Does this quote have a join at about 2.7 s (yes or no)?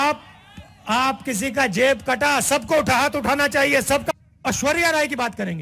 no